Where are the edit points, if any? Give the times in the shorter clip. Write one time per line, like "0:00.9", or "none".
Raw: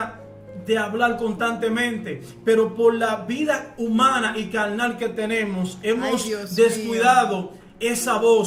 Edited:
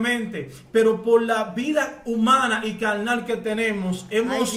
none